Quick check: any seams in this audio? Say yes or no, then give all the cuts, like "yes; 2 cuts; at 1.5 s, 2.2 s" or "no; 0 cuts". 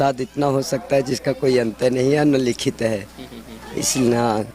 no; 0 cuts